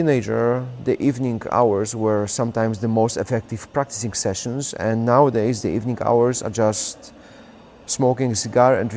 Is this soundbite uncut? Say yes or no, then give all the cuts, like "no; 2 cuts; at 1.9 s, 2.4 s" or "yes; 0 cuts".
yes; 0 cuts